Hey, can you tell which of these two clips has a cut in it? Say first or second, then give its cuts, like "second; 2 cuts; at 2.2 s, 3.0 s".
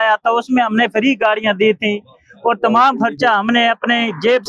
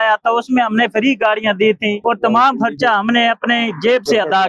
second; 1 cut; at 2.0 s